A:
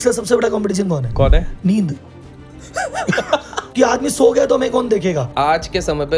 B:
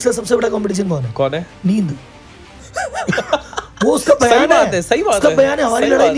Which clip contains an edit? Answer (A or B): A